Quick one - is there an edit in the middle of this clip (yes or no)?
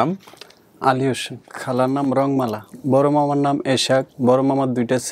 yes